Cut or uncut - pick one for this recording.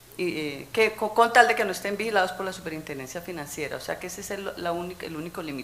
cut